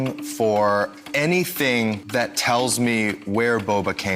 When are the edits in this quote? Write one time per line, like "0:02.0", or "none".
0:02.0